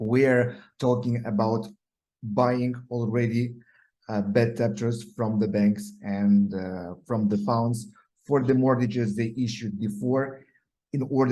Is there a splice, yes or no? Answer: no